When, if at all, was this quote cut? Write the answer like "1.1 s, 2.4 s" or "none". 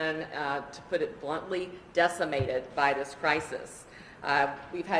none